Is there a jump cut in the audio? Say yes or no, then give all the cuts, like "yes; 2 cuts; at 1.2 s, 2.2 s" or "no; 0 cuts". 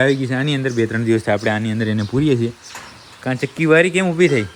no; 0 cuts